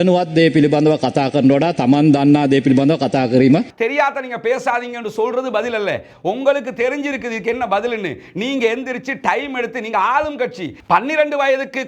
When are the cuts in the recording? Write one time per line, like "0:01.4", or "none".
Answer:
0:03.7
0:10.8